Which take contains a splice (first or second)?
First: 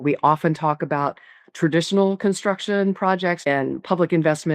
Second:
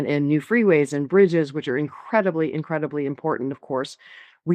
first